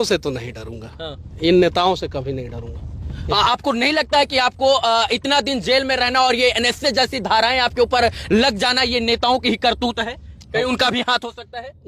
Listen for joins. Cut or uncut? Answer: uncut